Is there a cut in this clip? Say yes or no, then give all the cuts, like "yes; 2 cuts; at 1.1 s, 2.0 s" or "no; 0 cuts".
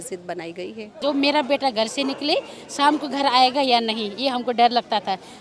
yes; 1 cut; at 1.0 s